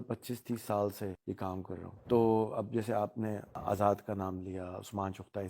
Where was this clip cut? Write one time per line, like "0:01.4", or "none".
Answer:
0:01.7
0:03.6